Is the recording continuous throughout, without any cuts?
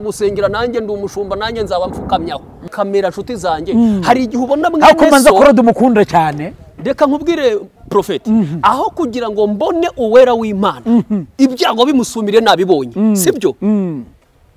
no; 1 cut; at 2.7 s

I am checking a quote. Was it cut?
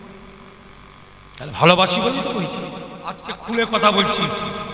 yes; 1 cut; at 3.3 s

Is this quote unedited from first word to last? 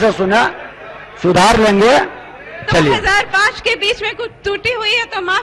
no; 1 cut; at 2.6 s

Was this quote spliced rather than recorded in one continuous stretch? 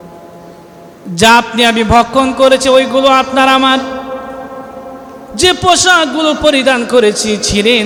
no; 0 cuts

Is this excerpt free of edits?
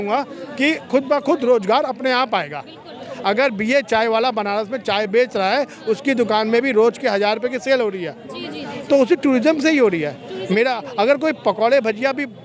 yes; 0 cuts

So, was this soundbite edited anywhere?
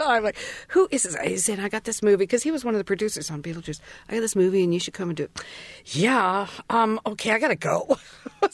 no; 0 cuts

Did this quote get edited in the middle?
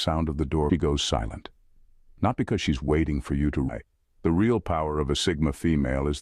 yes; 2 cuts; at 0.7 s, 3.7 s

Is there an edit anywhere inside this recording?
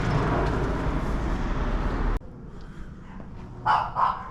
no; 0 cuts

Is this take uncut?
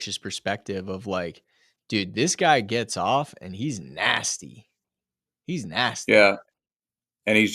yes; 0 cuts

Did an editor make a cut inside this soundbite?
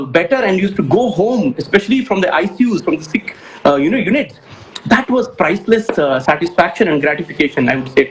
no; 0 cuts

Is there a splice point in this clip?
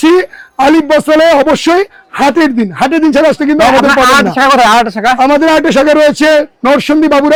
no; 0 cuts

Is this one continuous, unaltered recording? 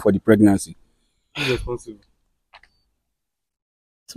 yes; 0 cuts

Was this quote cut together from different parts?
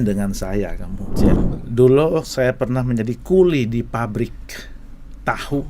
yes; 1 cut; at 1.4 s

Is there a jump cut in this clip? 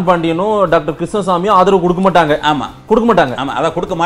no; 0 cuts

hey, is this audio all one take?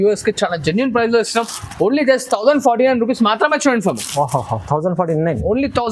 yes; 0 cuts

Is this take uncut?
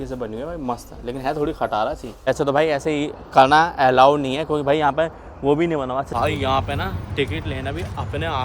no; 2 cuts; at 2.3 s, 6.1 s

